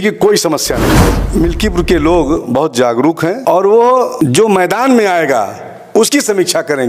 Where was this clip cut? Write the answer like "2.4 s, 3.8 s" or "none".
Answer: 1.2 s, 3.4 s, 4.1 s

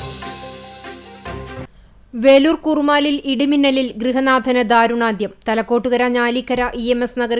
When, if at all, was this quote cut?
none

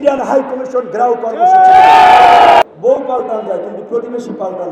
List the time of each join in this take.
2.6 s

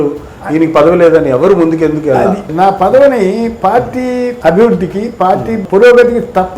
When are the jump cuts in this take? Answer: 2.5 s, 4.3 s

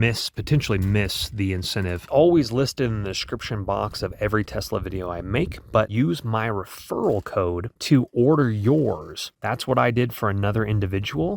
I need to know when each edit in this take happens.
2.0 s, 5.9 s

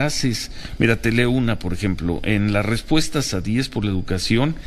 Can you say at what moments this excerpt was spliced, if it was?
none

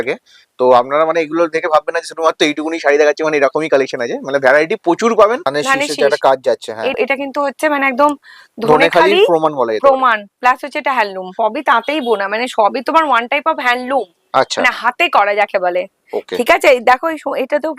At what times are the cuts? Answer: 5.5 s, 7.0 s, 11.3 s

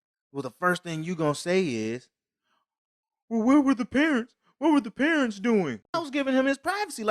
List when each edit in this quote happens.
5.9 s

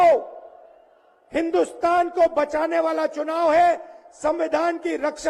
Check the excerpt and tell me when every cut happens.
none

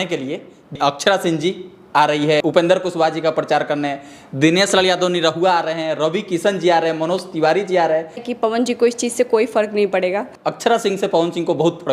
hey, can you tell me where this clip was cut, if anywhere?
0.8 s, 2.4 s, 8.3 s, 10.3 s

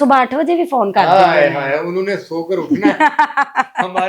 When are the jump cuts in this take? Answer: none

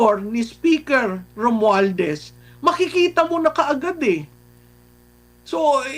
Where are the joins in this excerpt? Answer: none

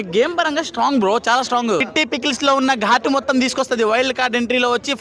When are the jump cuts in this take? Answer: 1.9 s

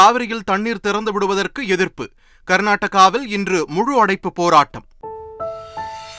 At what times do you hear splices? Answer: 5.2 s

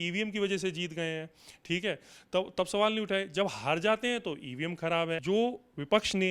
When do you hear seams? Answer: 5.2 s

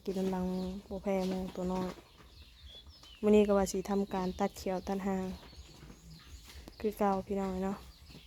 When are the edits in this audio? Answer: none

